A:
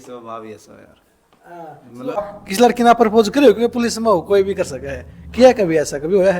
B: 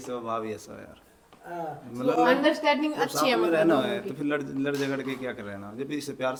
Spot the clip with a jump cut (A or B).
A